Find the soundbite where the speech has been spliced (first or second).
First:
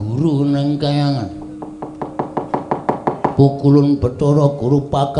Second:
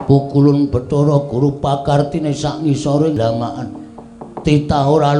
second